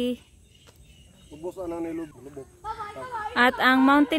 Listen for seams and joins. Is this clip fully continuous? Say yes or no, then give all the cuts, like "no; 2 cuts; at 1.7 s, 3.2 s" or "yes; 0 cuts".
yes; 0 cuts